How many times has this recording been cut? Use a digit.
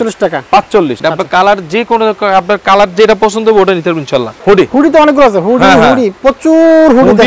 2